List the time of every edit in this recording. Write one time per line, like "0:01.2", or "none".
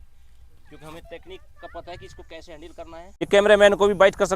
0:03.2